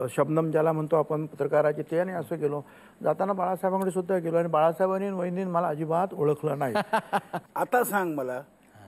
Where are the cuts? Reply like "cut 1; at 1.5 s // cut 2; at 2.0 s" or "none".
cut 1; at 7.4 s